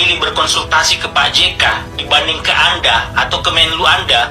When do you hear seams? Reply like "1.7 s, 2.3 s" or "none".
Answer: none